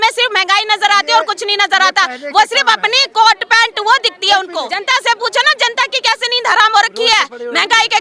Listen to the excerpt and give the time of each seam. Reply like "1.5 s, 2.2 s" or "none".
4.7 s